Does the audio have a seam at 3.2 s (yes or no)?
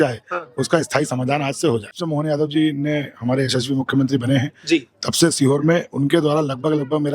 no